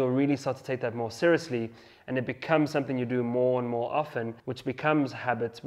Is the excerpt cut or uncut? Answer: cut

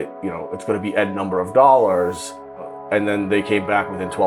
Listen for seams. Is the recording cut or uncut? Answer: cut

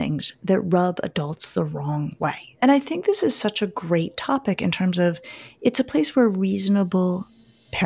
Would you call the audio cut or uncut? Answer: cut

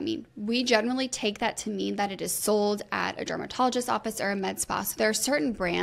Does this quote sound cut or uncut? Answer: uncut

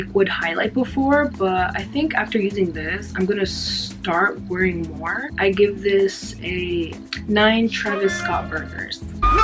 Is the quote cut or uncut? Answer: cut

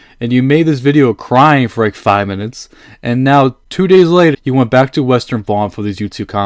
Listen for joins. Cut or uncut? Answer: cut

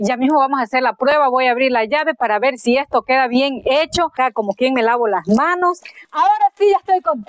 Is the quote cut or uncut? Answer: cut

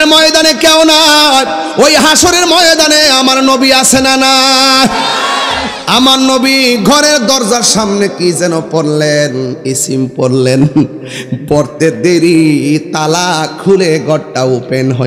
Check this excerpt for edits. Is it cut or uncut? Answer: uncut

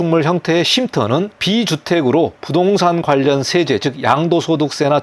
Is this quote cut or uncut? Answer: cut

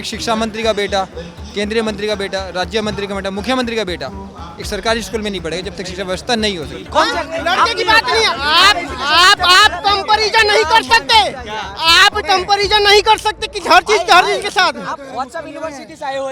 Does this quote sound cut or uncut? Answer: cut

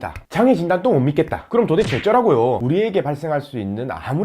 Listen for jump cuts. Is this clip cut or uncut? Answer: cut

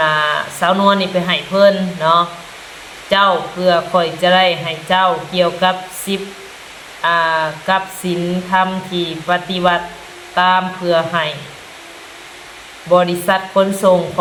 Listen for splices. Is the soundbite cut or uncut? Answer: uncut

